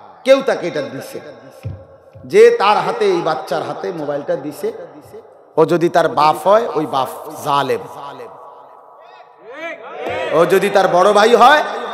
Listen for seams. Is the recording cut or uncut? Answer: uncut